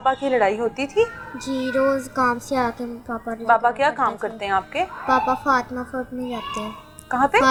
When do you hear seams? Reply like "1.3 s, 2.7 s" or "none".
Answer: none